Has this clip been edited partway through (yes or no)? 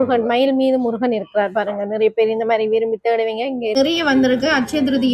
yes